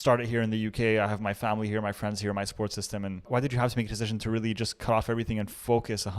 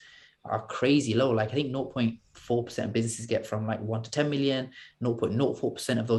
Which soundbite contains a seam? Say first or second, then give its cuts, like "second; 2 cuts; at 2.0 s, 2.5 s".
first; 1 cut; at 3.3 s